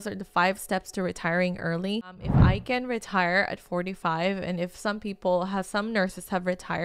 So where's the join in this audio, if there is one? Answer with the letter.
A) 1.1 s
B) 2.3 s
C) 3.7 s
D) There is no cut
B